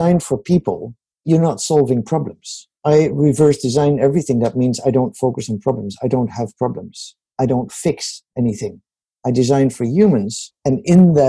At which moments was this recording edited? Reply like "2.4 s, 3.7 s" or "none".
1.2 s, 2.7 s